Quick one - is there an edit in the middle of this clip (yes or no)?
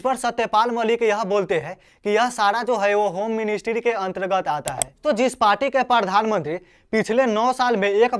yes